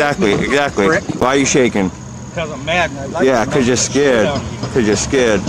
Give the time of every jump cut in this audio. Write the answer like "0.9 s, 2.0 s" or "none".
1.2 s